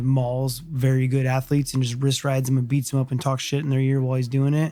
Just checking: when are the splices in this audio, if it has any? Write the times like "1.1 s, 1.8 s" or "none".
none